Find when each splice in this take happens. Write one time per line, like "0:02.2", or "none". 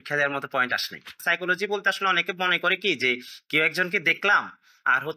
0:01.1